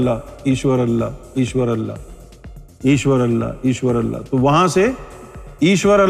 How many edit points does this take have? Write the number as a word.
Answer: zero